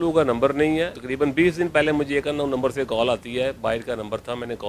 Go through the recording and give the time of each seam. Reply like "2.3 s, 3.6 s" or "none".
1.0 s